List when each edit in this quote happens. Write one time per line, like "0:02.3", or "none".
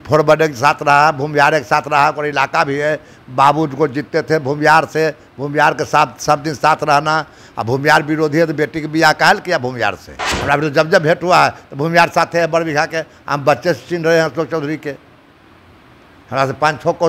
0:10.3